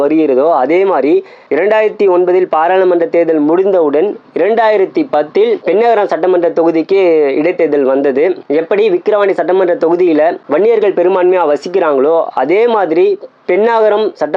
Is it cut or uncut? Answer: uncut